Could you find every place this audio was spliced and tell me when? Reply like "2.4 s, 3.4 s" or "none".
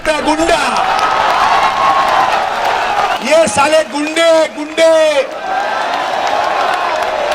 3.2 s

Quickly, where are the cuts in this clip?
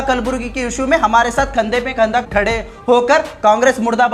2.2 s

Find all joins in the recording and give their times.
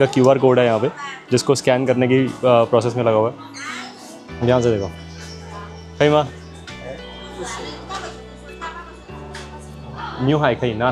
none

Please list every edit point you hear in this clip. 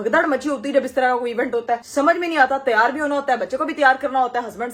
none

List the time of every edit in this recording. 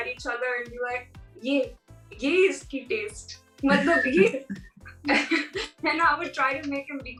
none

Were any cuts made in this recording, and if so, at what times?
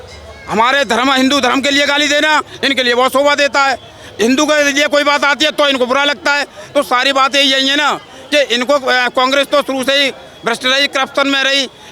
none

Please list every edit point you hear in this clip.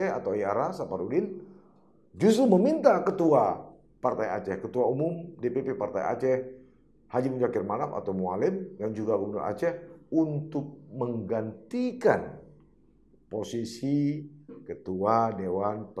none

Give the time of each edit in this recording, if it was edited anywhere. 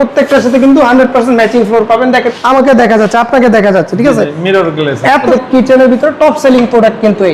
2.4 s, 5.3 s

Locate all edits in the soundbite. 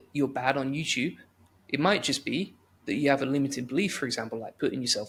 none

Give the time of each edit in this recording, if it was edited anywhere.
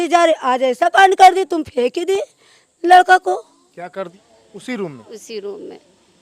4.1 s

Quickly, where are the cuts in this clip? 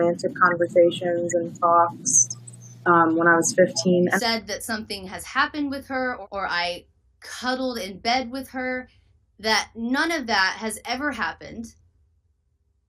4.1 s, 6.2 s

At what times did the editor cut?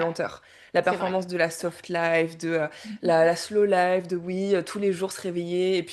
none

